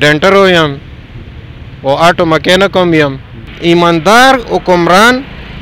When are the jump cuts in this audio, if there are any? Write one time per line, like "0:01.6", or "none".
0:03.5